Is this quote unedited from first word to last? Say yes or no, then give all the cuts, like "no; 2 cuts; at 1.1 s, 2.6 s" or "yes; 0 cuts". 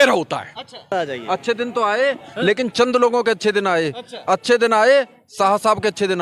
no; 1 cut; at 0.9 s